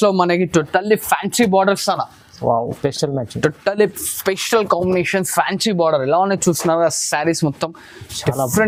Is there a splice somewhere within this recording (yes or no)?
no